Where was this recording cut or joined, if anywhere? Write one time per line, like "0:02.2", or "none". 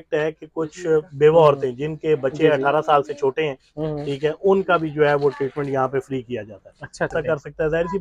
0:07.1